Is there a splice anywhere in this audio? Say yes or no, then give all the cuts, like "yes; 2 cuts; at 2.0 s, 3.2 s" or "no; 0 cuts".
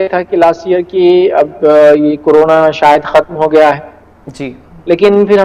no; 0 cuts